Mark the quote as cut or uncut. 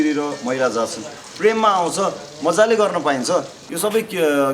cut